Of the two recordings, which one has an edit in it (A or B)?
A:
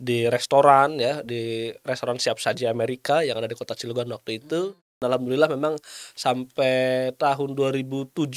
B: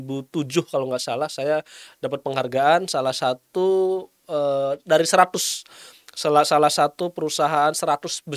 A